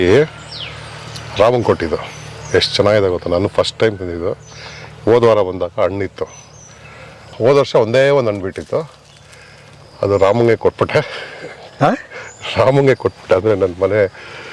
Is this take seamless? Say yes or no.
no